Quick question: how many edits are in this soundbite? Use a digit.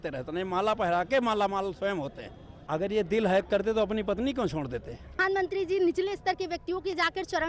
2